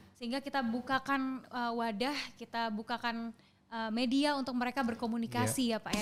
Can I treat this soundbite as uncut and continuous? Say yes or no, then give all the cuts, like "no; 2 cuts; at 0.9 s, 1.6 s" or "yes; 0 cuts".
yes; 0 cuts